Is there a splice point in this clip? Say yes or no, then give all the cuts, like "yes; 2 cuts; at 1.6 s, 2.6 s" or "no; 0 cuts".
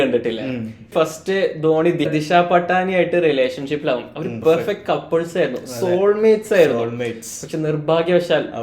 yes; 3 cuts; at 0.9 s, 2.1 s, 4.3 s